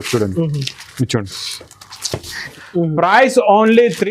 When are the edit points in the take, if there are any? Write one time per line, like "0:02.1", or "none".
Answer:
0:02.5